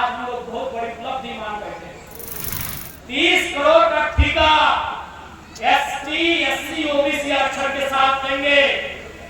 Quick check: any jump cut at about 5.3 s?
no; 1 cut; at 2.5 s

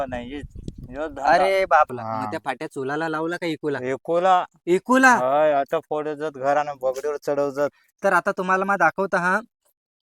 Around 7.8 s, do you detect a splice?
yes; 2 cuts; at 1.9 s, 7.8 s

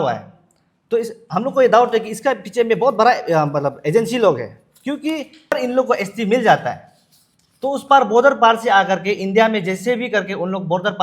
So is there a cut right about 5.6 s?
yes; 1 cut; at 5.6 s

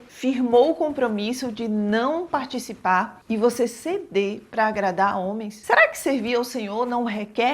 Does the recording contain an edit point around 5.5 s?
yes; 1 cut; at 5.5 s

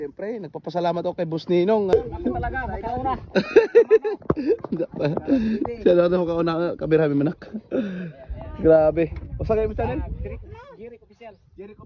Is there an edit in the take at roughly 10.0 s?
no; 1 cut; at 1.9 s

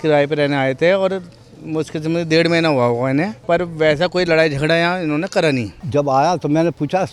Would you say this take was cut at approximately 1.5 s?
no; 2 cuts; at 3.4 s, 5.8 s

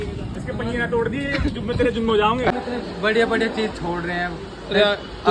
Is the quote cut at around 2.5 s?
yes; 1 cut; at 2.5 s

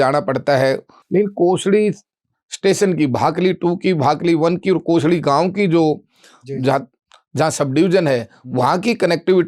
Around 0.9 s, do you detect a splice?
yes; 1 cut; at 0.9 s

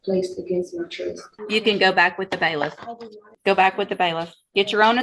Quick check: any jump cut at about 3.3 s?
yes; 2 cuts; at 1.3 s, 3.3 s

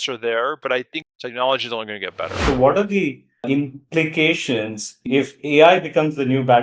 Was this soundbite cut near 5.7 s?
no; 2 cuts; at 1.0 s, 2.4 s

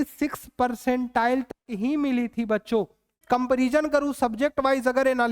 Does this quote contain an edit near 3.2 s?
yes; 1 cut; at 3.2 s

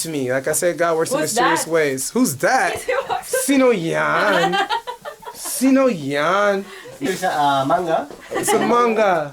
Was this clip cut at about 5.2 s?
no; 1 cut; at 7.1 s

